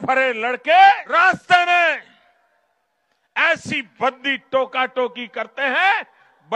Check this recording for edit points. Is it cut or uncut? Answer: cut